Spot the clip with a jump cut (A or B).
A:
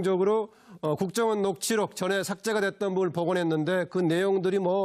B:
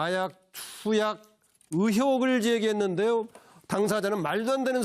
B